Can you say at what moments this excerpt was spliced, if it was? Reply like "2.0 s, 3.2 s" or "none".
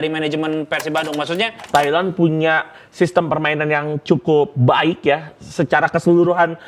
1.5 s